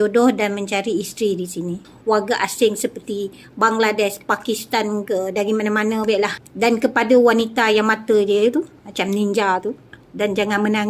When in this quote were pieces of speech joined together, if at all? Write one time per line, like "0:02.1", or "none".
0:01.9
0:06.4
0:10.0